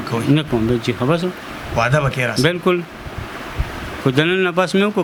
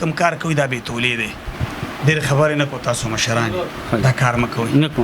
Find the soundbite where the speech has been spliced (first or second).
second